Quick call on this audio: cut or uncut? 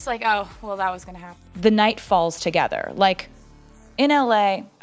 cut